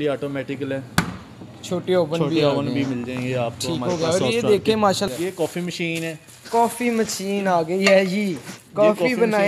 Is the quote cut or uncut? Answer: cut